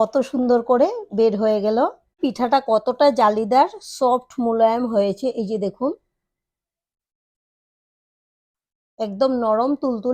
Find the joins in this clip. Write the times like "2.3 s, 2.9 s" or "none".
2.2 s